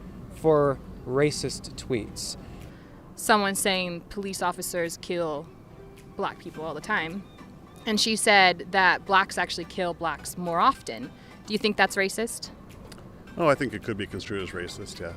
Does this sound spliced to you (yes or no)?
yes